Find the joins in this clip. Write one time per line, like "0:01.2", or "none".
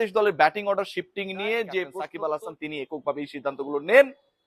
0:02.0

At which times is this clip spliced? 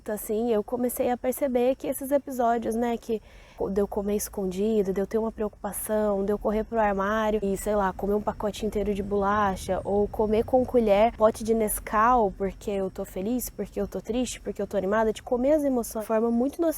0:03.5
0:07.4
0:11.1
0:16.0

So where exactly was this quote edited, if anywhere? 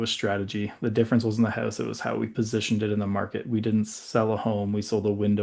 none

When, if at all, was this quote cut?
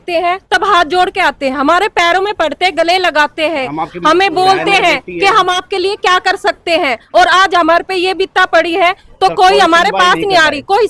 none

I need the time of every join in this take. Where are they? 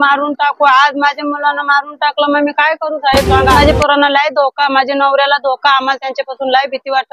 0:03.6

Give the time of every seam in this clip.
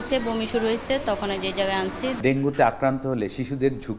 0:02.2

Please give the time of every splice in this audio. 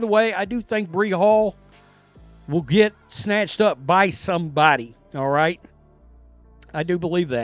none

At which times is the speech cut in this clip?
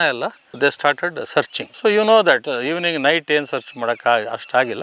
none

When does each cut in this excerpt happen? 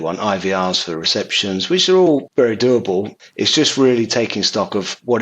0:02.3
0:03.2

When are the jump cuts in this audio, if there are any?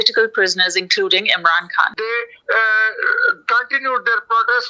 0:01.9

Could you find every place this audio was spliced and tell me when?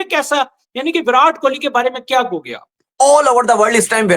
0:02.8

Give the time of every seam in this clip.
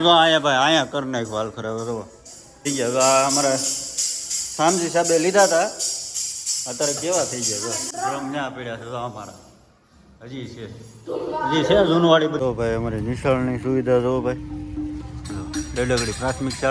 0:02.6
0:07.8
0:12.3

